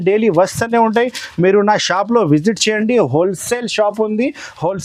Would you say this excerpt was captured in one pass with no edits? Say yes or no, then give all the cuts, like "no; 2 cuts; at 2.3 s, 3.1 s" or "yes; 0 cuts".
yes; 0 cuts